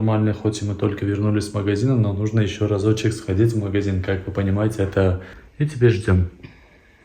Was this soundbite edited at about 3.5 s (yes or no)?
no